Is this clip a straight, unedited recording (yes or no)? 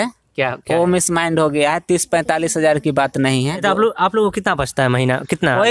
no